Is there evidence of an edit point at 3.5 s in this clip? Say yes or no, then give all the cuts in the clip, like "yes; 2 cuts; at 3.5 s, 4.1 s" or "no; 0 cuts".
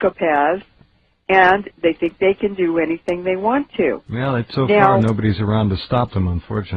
yes; 1 cut; at 3.5 s